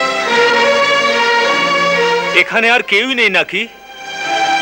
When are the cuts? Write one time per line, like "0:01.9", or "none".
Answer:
none